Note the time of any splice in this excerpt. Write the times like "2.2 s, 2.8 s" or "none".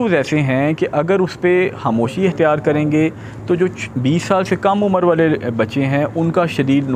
none